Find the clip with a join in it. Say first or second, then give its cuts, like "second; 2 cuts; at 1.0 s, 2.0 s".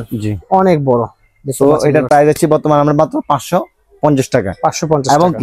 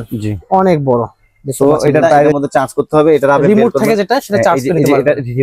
second; 1 cut; at 2.4 s